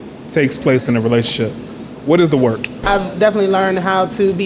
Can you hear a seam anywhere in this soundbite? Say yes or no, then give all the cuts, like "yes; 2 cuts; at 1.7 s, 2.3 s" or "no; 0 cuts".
yes; 1 cut; at 2.8 s